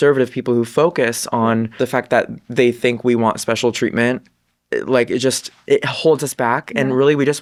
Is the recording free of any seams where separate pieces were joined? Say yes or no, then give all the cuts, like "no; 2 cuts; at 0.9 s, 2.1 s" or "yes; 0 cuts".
yes; 0 cuts